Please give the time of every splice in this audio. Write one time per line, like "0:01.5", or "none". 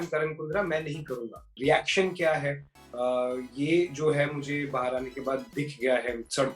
0:01.5